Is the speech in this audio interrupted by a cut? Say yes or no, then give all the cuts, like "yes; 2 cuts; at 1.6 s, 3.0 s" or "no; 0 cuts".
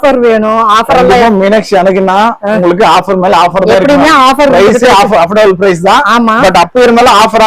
no; 0 cuts